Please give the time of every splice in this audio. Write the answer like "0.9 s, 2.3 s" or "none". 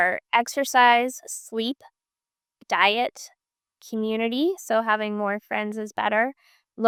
none